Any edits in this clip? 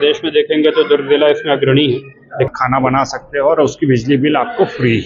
yes; 1 cut; at 2.5 s

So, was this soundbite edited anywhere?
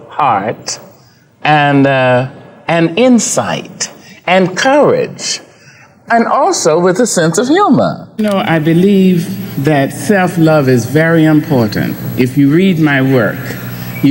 yes; 1 cut; at 8.1 s

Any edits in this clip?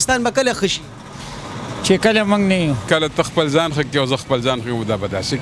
yes; 1 cut; at 2.8 s

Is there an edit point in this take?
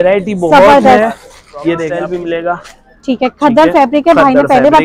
yes; 1 cut; at 1.9 s

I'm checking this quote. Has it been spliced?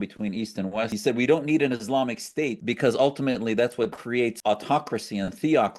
yes; 3 cuts; at 0.9 s, 2.6 s, 4.1 s

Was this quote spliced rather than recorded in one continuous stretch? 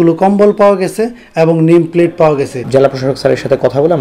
yes; 1 cut; at 2.6 s

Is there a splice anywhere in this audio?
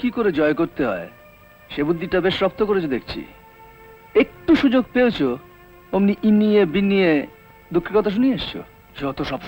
no; 0 cuts

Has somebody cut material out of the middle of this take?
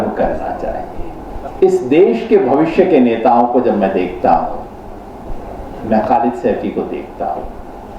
yes; 1 cut; at 1.4 s

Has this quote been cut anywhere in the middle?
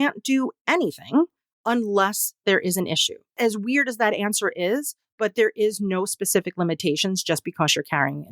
yes; 1 cut; at 3.3 s

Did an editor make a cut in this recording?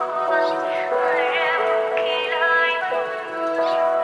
no; 0 cuts

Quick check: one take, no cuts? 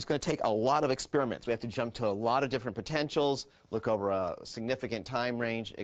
yes; 0 cuts

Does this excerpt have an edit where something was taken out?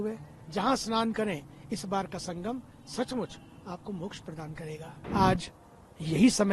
yes; 1 cut; at 4.9 s

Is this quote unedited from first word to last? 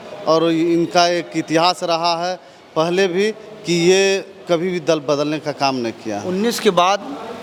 yes; 0 cuts

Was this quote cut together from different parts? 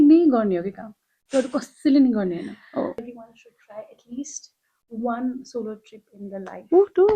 yes; 1 cut; at 3.0 s

